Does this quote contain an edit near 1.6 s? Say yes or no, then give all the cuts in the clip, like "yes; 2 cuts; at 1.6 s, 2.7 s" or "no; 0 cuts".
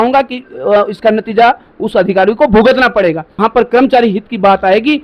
no; 1 cut; at 3.3 s